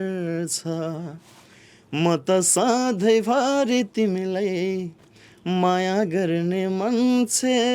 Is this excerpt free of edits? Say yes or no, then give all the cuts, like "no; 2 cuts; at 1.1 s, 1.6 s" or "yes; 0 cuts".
yes; 0 cuts